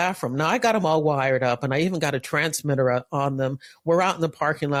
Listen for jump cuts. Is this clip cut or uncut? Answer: uncut